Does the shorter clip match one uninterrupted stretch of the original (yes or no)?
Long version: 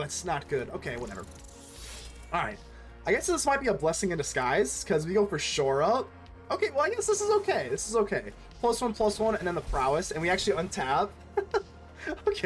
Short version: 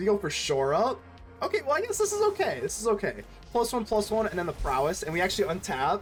yes